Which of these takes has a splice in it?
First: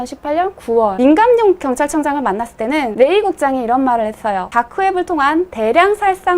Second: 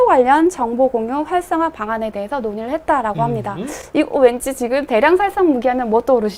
first; 3 cuts; at 0.9 s, 2.9 s, 4.4 s

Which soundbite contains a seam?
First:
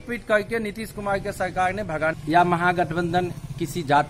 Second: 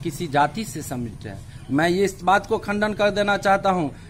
first; 1 cut; at 2.2 s

